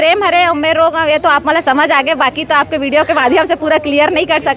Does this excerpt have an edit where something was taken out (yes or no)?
no